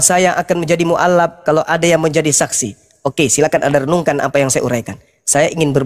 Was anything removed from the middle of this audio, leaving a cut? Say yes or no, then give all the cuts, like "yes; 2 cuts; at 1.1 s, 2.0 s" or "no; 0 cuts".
no; 0 cuts